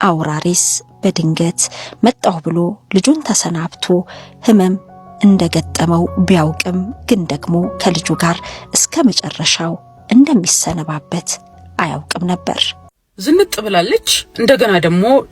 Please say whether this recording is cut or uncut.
cut